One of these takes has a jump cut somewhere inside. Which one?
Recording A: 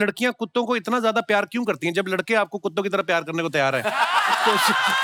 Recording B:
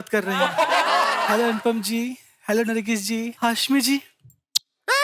B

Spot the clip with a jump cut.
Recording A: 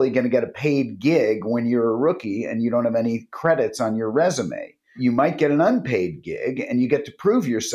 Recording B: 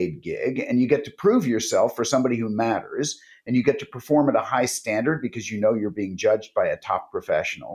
A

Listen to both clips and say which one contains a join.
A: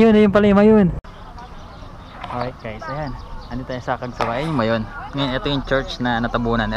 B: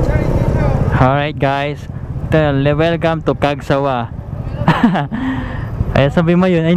A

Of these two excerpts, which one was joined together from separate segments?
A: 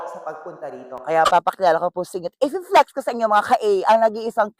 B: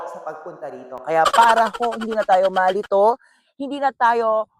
A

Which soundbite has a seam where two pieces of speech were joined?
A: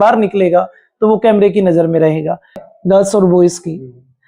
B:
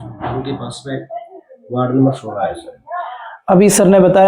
A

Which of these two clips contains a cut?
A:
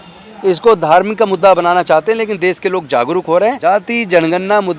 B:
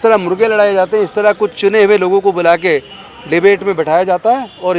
A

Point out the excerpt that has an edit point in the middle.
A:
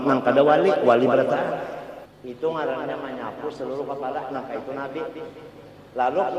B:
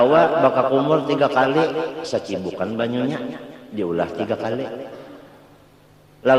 A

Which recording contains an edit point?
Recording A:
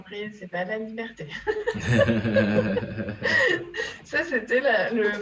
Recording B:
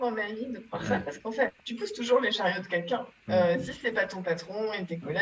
B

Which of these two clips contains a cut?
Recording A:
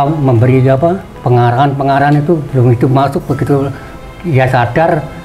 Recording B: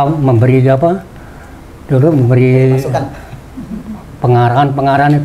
A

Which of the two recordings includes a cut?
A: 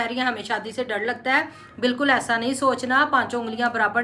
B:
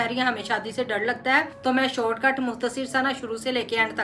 B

